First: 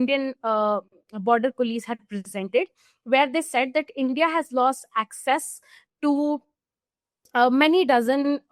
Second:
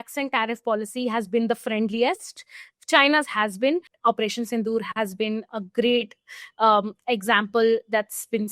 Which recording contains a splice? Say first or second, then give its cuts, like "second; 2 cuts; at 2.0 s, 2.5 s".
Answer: second; 1 cut; at 3.9 s